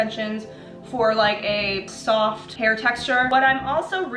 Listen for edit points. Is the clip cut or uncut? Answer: cut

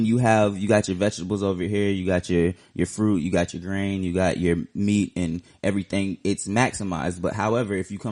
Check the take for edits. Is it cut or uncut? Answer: uncut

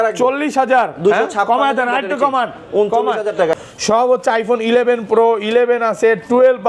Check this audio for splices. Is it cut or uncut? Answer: cut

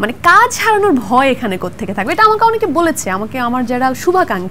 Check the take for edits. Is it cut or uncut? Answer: uncut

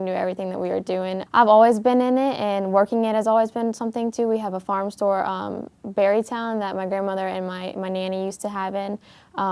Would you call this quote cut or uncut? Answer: cut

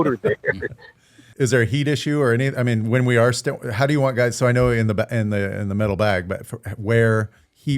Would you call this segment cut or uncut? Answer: cut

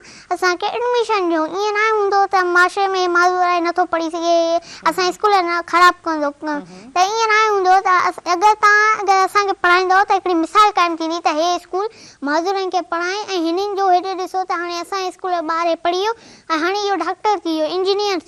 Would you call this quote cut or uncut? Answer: uncut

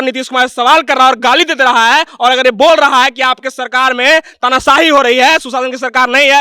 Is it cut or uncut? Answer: uncut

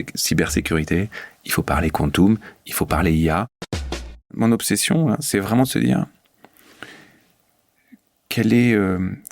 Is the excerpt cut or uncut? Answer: cut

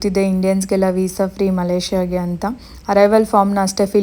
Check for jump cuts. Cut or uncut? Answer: uncut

